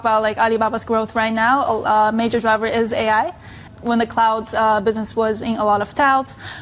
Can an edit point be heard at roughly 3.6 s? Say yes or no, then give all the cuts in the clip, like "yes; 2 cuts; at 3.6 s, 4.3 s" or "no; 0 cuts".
yes; 1 cut; at 3.6 s